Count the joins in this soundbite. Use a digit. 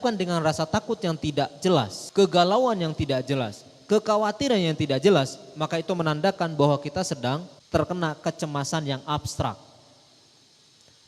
2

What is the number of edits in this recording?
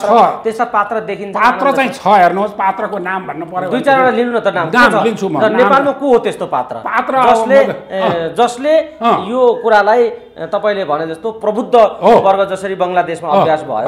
0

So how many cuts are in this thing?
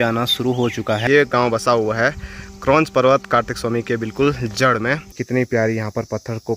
2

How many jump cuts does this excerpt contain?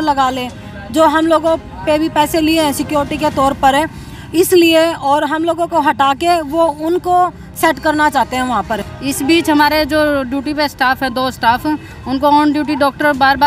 1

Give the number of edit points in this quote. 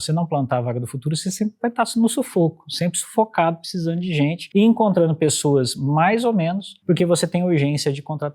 2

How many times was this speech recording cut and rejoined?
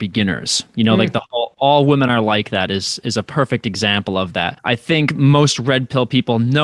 1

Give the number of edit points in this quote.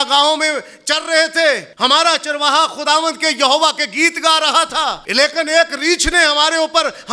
2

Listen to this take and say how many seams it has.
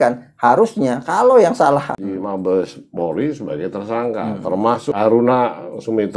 2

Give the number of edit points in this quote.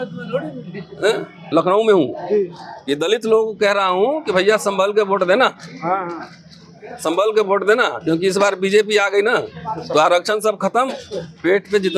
1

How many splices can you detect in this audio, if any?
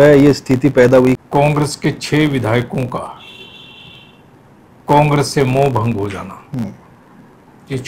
1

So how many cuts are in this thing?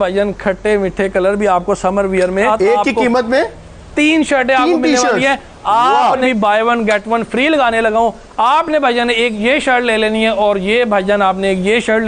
2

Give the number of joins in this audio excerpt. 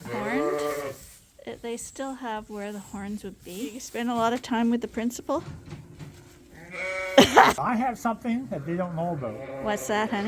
2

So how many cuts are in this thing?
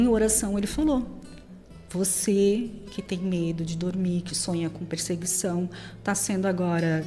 0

